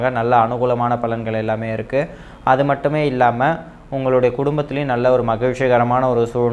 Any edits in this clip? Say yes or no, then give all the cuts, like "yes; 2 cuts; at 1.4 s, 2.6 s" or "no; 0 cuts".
no; 0 cuts